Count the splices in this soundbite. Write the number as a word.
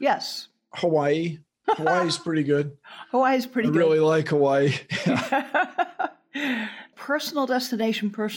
one